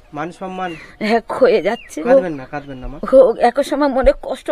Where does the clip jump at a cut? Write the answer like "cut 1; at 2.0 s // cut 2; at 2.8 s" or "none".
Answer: cut 1; at 1.9 s